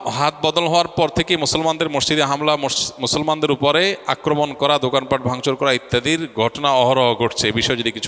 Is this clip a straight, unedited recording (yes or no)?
yes